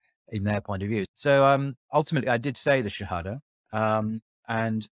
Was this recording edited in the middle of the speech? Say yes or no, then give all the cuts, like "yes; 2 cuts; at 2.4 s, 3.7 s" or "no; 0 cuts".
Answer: yes; 1 cut; at 1.1 s